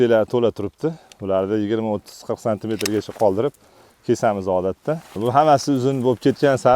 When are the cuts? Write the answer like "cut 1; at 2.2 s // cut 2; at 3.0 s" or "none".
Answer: cut 1; at 5.2 s